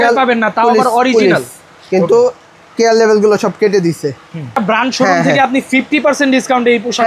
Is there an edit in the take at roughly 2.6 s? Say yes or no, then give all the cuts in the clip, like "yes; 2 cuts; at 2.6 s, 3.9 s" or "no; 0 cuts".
no; 1 cut; at 4.6 s